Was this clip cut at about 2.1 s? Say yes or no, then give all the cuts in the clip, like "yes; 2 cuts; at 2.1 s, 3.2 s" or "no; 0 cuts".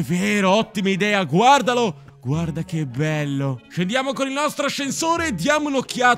no; 1 cut; at 3.7 s